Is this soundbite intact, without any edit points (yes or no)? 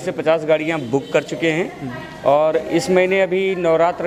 yes